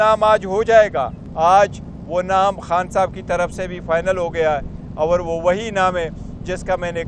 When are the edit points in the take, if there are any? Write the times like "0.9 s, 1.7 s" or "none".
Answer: 1.2 s